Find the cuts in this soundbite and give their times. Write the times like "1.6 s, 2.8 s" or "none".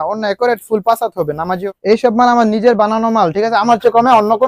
1.6 s

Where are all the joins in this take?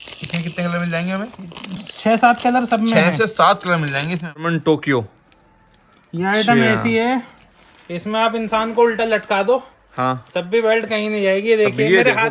4.5 s

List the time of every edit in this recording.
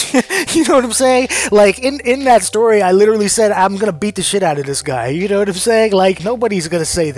6.2 s

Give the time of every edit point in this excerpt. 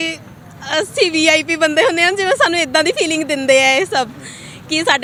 none

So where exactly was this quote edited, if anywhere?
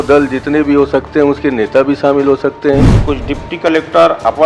2.9 s

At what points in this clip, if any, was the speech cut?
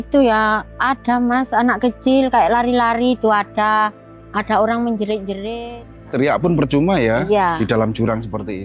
6.1 s

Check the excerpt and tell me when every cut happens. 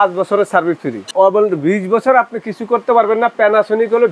1.1 s

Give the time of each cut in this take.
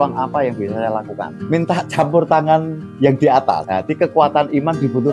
1.3 s, 3.7 s

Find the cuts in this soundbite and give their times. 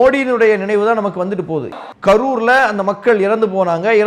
1.7 s

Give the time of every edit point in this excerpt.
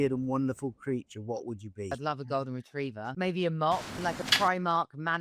2.0 s, 3.1 s, 4.2 s

